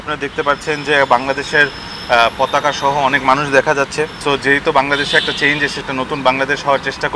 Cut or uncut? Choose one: cut